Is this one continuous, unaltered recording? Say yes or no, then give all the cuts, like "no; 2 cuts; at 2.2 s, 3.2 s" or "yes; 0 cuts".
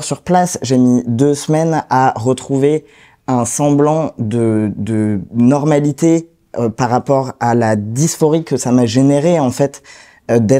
yes; 0 cuts